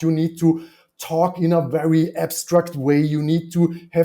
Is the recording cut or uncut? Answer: uncut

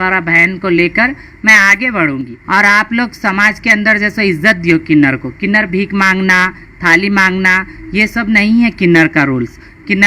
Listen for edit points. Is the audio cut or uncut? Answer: cut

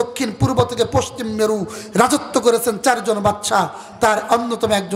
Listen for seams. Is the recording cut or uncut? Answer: uncut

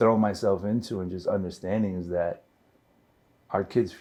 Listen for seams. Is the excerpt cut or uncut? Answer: uncut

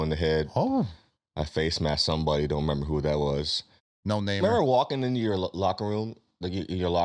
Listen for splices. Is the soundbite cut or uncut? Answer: cut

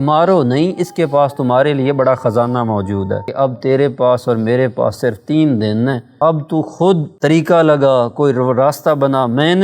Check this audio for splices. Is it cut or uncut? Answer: cut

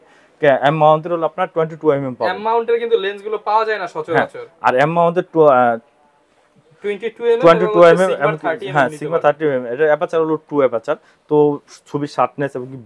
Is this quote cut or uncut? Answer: uncut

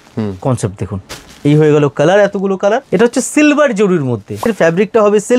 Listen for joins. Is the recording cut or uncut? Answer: cut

